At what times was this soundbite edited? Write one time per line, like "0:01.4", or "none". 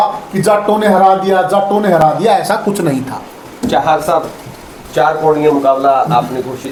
none